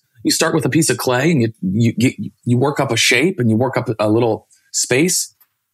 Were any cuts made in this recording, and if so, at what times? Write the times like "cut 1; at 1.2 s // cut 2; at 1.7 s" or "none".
none